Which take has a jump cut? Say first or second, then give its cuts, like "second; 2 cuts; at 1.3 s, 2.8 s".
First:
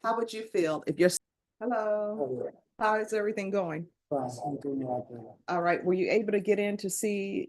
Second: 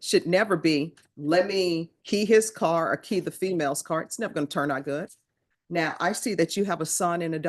first; 1 cut; at 1.2 s